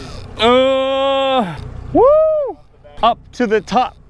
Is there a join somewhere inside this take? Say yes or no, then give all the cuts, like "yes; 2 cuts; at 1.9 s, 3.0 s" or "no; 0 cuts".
no; 0 cuts